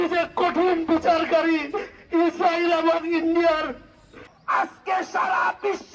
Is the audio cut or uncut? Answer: cut